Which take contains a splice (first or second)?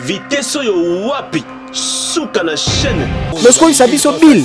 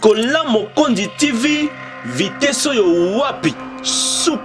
first